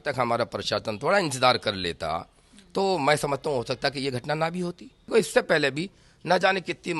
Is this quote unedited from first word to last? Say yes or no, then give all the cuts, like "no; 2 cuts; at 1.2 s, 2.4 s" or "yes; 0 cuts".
no; 1 cut; at 5.1 s